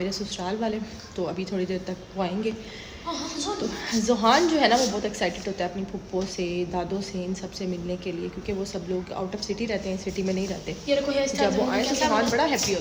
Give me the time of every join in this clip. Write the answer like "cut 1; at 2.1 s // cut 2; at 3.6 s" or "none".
none